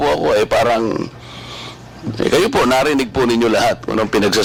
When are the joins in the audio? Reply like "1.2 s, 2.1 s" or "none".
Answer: none